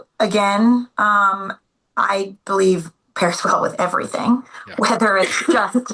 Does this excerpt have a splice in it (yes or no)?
no